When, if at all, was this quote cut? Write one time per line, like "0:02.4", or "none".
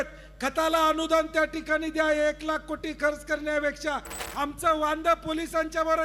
0:04.2

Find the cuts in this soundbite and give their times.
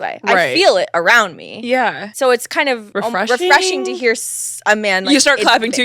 0:02.0
0:02.9

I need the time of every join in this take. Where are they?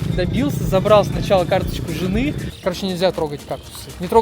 0:02.5

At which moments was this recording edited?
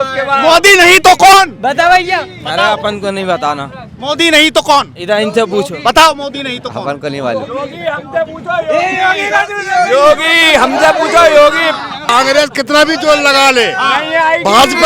0:12.0

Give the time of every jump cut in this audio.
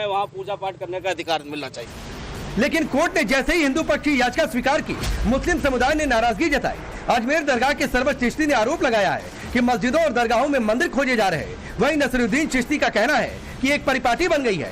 0:07.3

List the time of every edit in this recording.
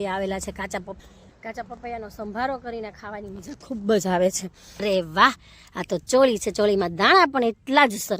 0:01.0
0:04.8

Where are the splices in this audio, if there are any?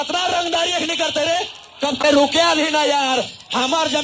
0:02.0

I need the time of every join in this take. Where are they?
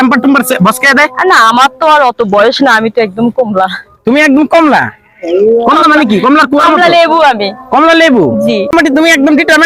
0:08.7

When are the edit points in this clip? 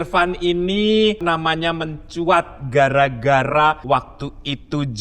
0:01.2
0:03.8

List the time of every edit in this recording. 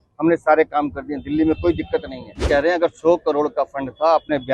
0:02.5

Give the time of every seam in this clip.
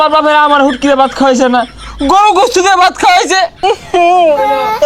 0:03.6

